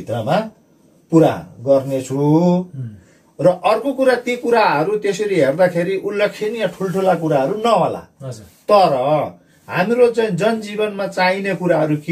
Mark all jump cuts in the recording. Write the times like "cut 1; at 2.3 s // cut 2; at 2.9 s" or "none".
none